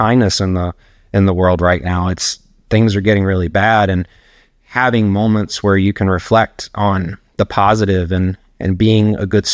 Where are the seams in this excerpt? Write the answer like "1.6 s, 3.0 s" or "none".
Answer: none